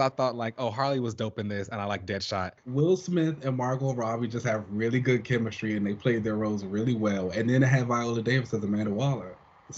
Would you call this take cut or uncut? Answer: cut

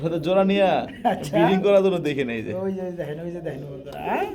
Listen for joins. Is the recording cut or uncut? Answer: uncut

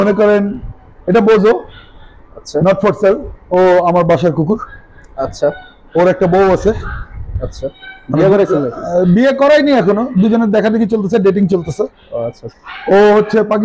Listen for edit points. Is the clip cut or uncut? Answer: cut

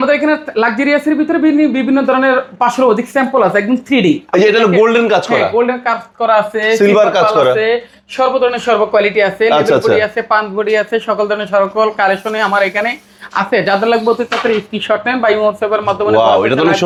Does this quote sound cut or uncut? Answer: uncut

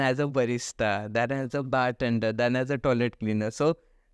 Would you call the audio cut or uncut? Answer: uncut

